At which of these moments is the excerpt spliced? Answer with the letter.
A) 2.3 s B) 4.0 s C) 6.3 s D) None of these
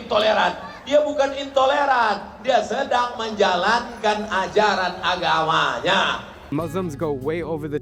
C